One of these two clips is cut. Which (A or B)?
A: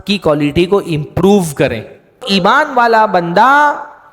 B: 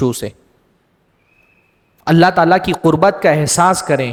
A